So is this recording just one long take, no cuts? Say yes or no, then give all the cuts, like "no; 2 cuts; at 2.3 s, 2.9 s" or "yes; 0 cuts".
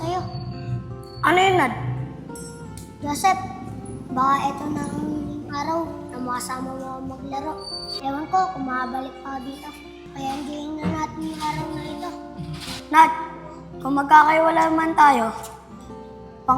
no; 1 cut; at 7.9 s